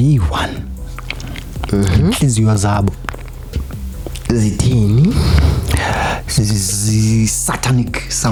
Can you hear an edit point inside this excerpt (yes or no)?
no